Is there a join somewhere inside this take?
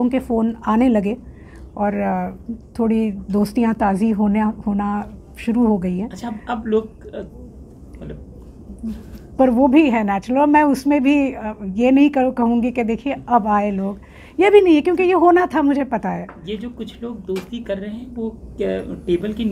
no; 0 cuts

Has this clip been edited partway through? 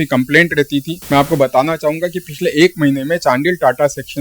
yes; 1 cut; at 1.0 s

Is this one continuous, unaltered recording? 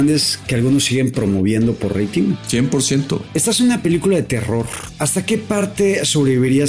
no; 3 cuts; at 2.4 s, 3.2 s, 5.1 s

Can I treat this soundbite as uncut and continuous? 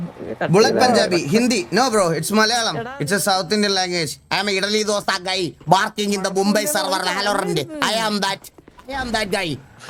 yes; 0 cuts

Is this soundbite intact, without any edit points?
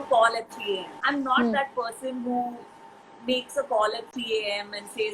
no; 1 cut; at 0.9 s

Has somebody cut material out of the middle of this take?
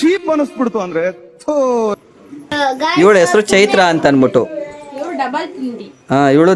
yes; 1 cut; at 2.5 s

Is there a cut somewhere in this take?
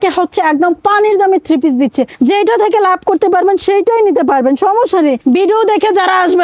yes; 2 cuts; at 2.1 s, 5.2 s

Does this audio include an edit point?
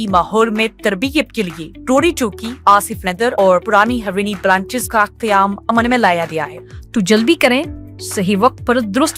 yes; 1 cut; at 6.5 s

